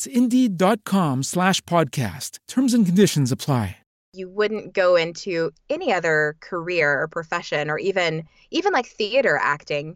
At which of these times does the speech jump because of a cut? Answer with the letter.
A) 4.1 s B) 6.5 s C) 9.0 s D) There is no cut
A